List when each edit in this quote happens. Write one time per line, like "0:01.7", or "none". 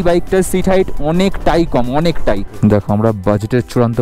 0:02.5